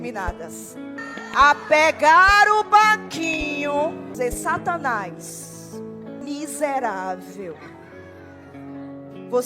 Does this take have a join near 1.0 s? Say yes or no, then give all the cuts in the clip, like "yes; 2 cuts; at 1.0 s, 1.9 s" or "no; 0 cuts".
yes; 3 cuts; at 1.0 s, 4.1 s, 6.2 s